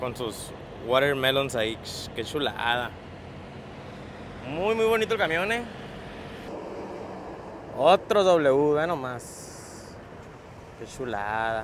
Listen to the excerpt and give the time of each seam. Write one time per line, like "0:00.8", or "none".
0:06.5